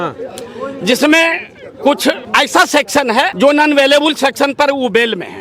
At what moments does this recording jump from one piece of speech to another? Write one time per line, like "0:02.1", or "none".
0:02.2
0:03.3